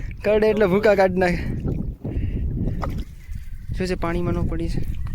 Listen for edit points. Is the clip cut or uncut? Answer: cut